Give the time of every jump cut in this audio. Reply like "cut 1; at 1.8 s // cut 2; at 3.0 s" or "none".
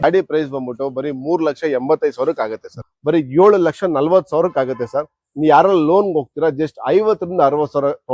cut 1; at 2.8 s